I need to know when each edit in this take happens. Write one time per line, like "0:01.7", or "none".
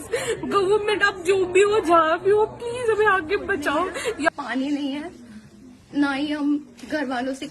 0:04.3

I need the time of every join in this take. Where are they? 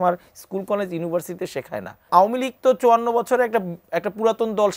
0:02.1

